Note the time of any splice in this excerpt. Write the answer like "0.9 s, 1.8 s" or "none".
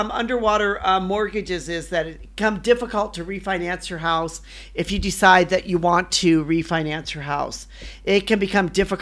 2.2 s